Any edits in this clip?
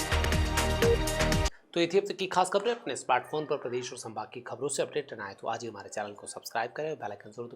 no; 0 cuts

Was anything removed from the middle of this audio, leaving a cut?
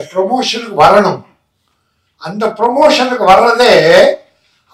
no; 0 cuts

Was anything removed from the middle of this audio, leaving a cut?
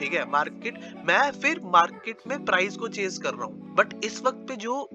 yes; 1 cut; at 3.6 s

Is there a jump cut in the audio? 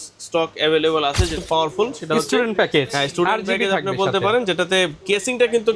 yes; 1 cut; at 1.4 s

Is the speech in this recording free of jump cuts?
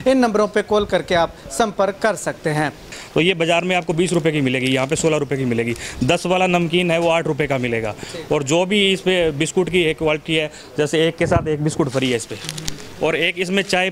no; 1 cut; at 3.0 s

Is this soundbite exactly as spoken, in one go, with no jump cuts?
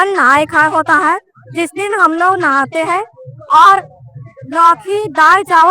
yes; 0 cuts

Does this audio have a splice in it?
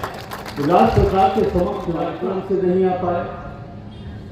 yes; 1 cut; at 2.0 s

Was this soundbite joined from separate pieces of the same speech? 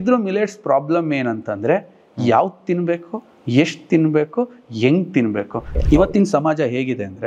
yes; 1 cut; at 5.7 s

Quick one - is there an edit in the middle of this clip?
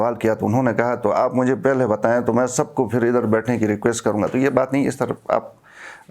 no; 0 cuts

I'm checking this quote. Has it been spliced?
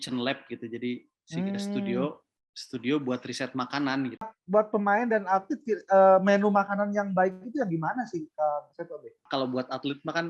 yes; 2 cuts; at 4.4 s, 9.2 s

